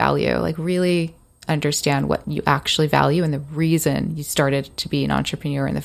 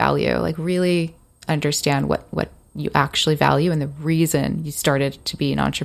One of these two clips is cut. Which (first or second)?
first